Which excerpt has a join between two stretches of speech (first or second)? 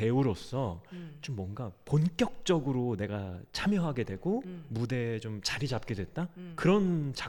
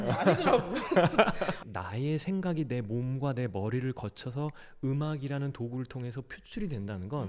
second